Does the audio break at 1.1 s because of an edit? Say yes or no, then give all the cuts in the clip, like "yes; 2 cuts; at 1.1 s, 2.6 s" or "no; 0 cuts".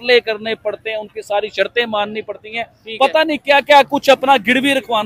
no; 0 cuts